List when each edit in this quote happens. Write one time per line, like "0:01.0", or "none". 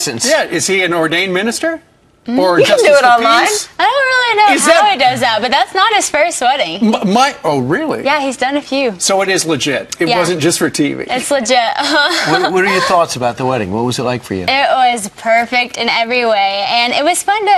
none